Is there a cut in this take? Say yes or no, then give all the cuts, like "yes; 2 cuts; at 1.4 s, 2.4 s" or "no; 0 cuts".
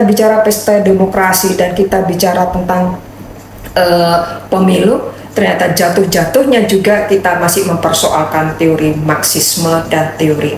no; 0 cuts